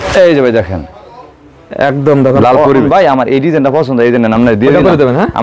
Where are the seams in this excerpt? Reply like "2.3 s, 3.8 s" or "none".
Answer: 2.8 s